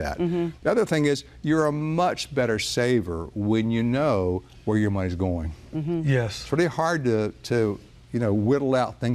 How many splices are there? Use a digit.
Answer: 1